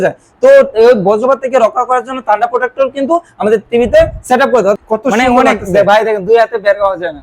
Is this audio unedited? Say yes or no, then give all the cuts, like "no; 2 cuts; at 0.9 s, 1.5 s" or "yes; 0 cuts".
no; 1 cut; at 4.8 s